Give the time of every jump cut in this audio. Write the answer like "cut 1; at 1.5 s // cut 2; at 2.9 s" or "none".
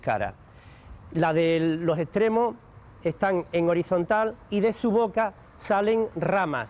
none